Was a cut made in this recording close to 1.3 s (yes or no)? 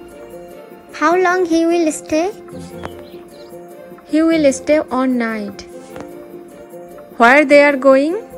no